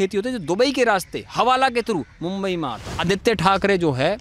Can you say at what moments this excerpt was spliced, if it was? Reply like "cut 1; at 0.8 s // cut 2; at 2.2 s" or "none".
cut 1; at 3.0 s